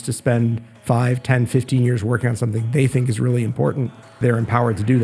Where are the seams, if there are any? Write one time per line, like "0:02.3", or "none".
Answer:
0:04.1